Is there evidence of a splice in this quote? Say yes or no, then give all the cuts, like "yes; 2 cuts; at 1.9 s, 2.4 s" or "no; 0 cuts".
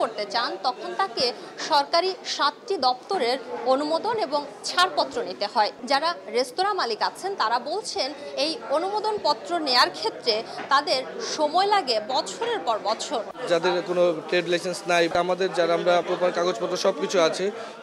yes; 4 cuts; at 5.8 s, 13.3 s, 15.1 s, 16.0 s